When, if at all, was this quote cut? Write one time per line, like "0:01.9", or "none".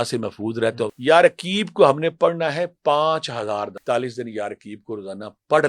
0:00.9
0:03.8

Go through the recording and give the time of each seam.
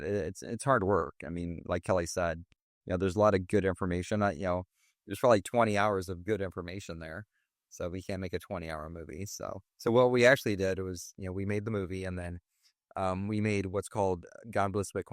0:09.7

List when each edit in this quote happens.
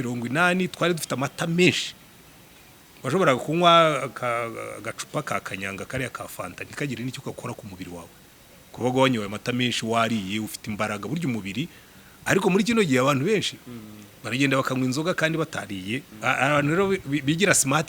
0:16.1

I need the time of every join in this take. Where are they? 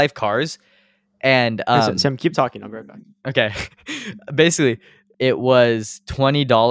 0:05.0

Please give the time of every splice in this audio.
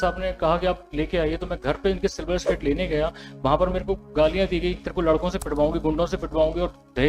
none

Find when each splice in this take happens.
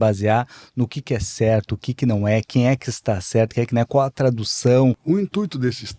0:05.0

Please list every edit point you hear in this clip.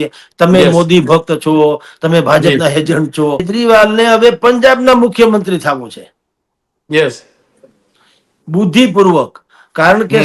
0:03.5

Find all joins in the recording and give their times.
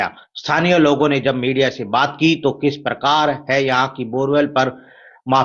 none

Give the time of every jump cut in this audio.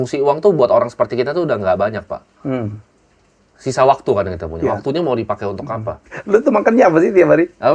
0:06.0

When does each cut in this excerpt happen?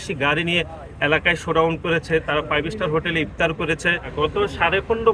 0:04.0

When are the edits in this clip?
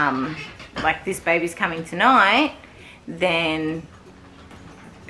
none

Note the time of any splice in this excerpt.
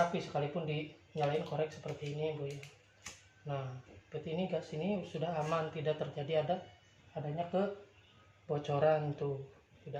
none

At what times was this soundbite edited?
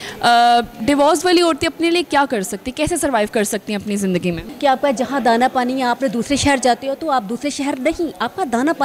0:04.5

